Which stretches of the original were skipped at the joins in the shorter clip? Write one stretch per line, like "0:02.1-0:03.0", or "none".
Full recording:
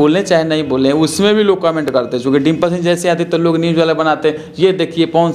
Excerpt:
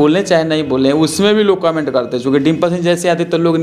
none